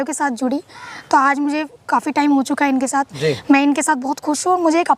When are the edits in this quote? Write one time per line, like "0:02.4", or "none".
0:03.1